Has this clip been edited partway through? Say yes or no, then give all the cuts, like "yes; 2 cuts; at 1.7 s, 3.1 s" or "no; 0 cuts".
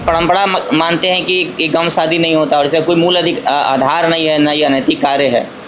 no; 0 cuts